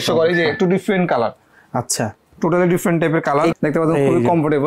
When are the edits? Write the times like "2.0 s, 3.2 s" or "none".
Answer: 3.5 s